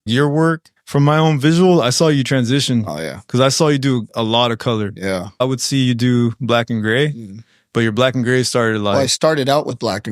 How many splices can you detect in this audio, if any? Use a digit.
0